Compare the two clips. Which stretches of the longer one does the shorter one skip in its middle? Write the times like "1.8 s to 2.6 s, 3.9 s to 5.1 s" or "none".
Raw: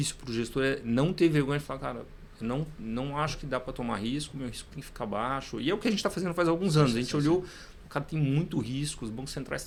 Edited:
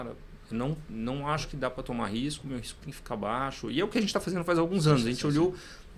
none

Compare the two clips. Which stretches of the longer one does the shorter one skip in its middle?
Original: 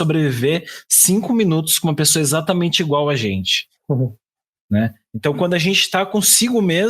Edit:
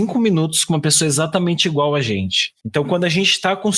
3.7 s to 5.0 s

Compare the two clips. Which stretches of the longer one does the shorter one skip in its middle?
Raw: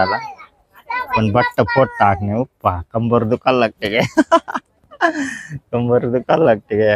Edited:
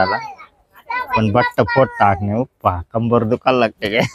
none

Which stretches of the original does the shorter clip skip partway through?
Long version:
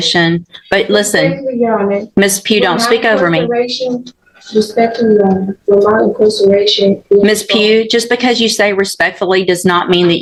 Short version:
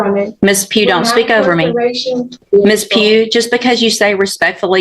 4.2 s to 7.0 s

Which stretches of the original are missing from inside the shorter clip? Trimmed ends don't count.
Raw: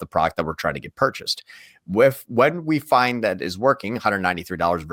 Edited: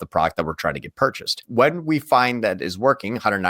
1.4 s to 2.2 s

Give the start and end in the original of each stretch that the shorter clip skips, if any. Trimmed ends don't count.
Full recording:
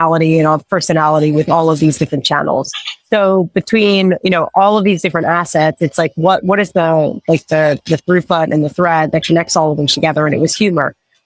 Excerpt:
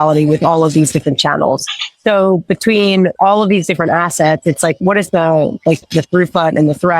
4.2 s to 4.5 s, 6.1 s to 6.4 s, 7.5 s to 7.8 s

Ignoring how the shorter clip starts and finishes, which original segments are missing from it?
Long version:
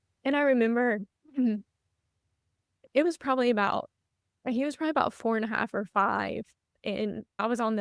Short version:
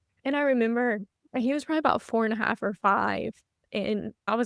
1.1 s to 4.3 s

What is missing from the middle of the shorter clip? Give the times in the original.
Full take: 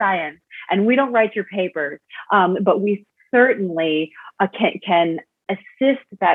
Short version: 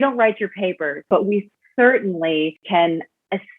2.0 s to 2.6 s, 4.2 s to 4.8 s

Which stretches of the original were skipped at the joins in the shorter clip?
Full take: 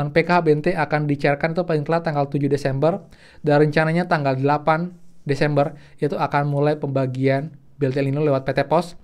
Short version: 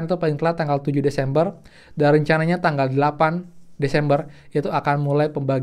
none

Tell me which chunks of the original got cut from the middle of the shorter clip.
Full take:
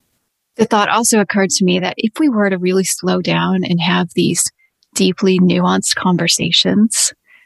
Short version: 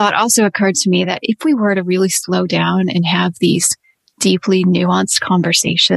none

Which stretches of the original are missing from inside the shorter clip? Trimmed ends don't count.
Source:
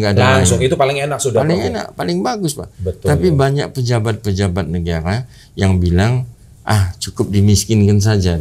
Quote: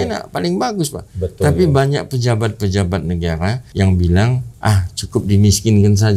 5.3 s to 5.5 s, 6.3 s to 6.5 s

